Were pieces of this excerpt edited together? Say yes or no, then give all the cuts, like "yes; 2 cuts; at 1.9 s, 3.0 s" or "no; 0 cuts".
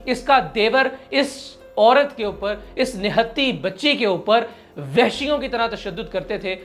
no; 0 cuts